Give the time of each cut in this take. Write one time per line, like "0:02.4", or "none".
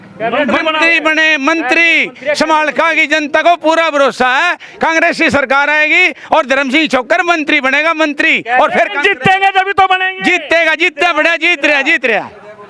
none